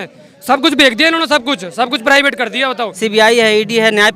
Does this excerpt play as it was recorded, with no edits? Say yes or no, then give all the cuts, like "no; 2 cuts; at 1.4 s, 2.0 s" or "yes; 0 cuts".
no; 1 cut; at 2.9 s